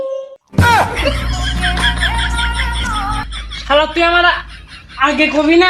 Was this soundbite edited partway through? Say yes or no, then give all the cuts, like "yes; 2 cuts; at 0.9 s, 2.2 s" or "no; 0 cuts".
no; 0 cuts